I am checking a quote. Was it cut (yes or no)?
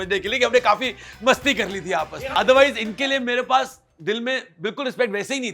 yes